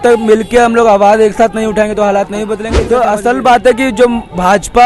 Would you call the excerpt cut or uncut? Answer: cut